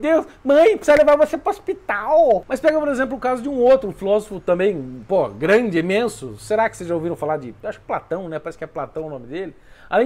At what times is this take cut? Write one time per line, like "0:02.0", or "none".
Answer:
none